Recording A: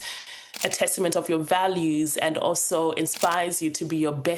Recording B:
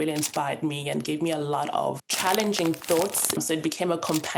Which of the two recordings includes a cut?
B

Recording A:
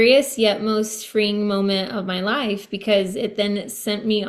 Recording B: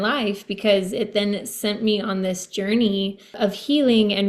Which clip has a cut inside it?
B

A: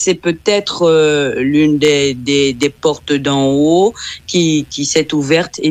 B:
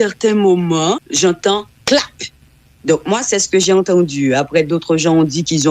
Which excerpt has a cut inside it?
B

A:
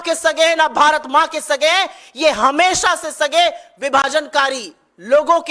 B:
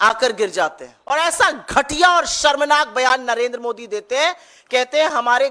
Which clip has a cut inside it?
B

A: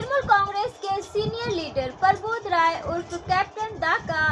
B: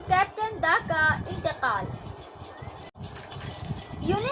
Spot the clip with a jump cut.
B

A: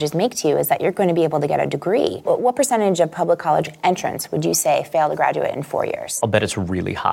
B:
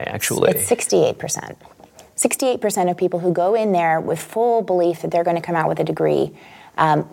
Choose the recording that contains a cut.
A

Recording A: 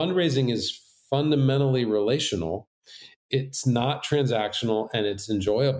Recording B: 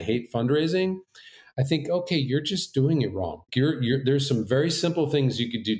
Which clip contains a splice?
A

